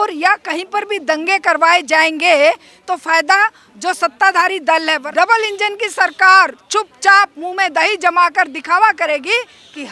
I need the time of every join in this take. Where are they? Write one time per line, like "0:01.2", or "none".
0:05.0